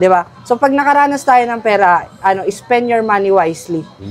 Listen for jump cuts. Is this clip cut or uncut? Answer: uncut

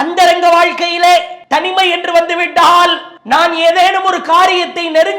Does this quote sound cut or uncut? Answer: cut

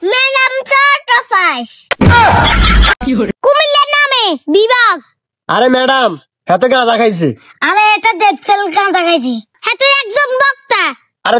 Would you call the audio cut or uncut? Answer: cut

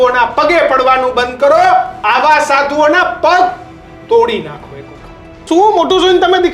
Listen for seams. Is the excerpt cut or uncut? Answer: cut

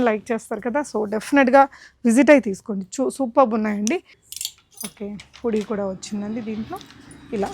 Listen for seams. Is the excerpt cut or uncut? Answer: cut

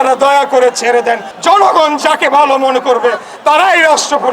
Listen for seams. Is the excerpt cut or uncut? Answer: cut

